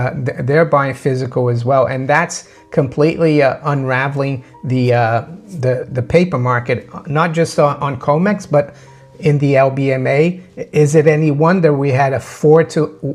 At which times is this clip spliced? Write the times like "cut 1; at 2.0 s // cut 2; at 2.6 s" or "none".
none